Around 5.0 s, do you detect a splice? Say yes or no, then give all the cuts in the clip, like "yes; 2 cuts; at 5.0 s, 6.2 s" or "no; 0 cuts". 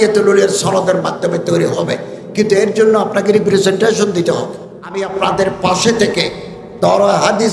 yes; 1 cut; at 5.0 s